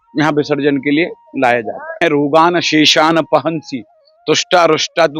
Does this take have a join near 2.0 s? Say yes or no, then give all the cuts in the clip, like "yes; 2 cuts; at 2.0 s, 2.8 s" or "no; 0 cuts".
yes; 1 cut; at 2.0 s